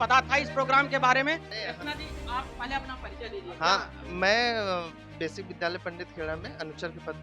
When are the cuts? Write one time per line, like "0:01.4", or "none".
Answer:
none

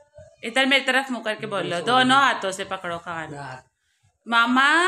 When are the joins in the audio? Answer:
none

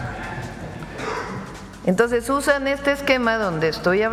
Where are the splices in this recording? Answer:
none

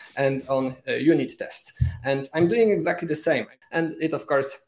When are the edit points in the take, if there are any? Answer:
0:03.5

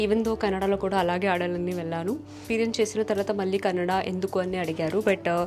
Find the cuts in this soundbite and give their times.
0:02.4

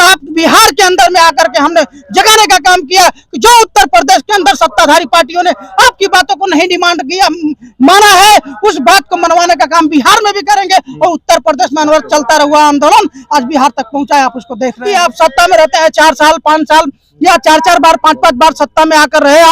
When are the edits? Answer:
0:14.8

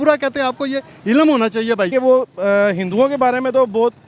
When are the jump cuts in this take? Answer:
0:01.9

